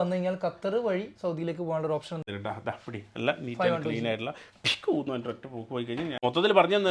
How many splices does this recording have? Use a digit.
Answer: 2